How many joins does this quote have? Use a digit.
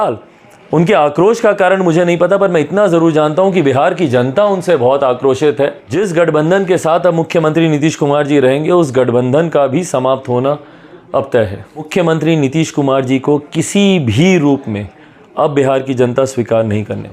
2